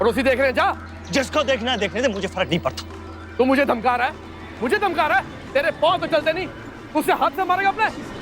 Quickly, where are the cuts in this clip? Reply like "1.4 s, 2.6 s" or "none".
0.9 s, 3.2 s